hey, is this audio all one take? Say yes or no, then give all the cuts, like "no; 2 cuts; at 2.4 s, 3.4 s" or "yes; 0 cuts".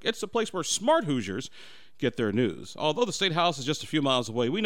yes; 0 cuts